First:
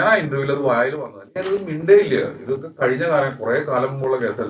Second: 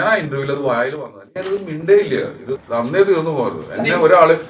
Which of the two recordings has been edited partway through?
second; 1 cut; at 2.6 s

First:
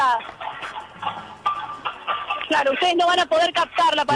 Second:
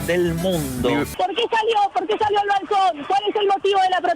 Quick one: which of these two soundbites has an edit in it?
second; 1 cut; at 1.1 s

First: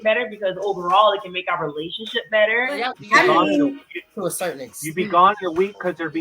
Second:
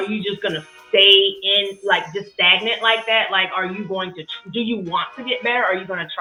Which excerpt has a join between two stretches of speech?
first; 1 cut; at 2.9 s

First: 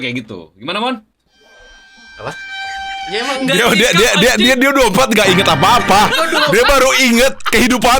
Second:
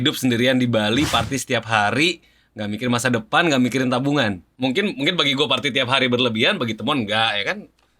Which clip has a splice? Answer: second; 1 cut; at 4.5 s

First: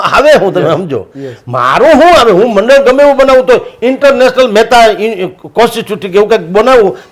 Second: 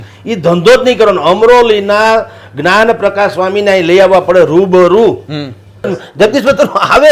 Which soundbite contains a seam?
second; 1 cut; at 5.9 s

